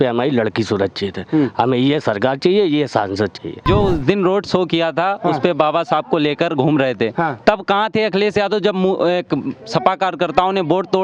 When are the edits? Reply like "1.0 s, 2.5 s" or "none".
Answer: 3.6 s